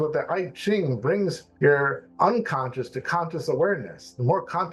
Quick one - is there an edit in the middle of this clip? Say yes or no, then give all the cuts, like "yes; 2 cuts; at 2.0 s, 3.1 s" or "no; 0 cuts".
no; 0 cuts